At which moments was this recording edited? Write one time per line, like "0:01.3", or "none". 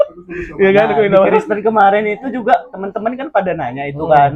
none